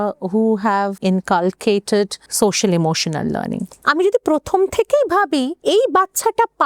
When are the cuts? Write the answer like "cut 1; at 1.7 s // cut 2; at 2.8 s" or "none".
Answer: cut 1; at 1.0 s // cut 2; at 2.2 s // cut 3; at 3.7 s // cut 4; at 5.6 s